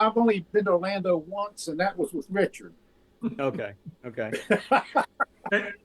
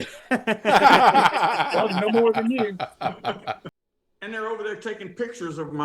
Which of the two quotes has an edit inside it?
second; 1 cut; at 3.7 s

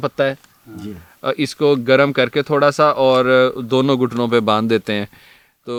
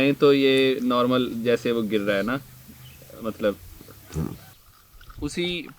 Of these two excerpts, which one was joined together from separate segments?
second; 1 cut; at 4.5 s

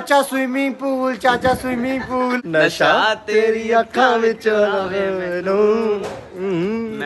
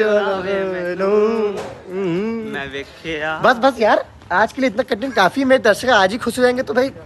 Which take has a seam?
first; 1 cut; at 2.4 s

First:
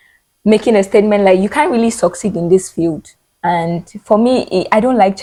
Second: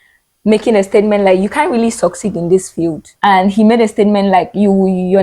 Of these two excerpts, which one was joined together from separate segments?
second; 1 cut; at 3.1 s

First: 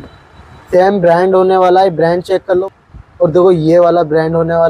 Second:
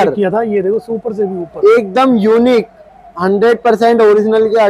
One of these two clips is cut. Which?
first; 1 cut; at 2.7 s

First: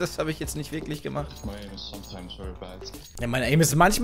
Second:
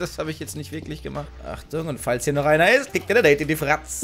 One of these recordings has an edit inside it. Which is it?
first; 1 cut; at 1.3 s

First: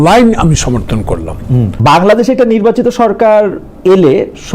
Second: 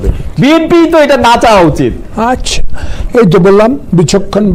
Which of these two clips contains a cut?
first; 1 cut; at 1.8 s

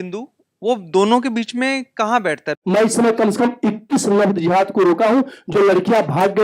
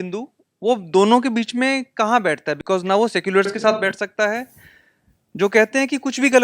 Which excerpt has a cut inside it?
first; 1 cut; at 2.6 s

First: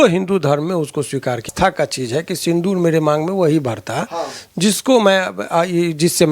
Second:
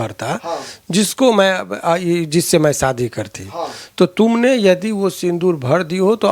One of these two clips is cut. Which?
first; 1 cut; at 1.5 s

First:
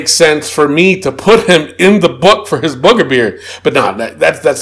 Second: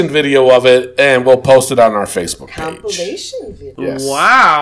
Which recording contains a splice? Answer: second; 1 cut; at 3.6 s

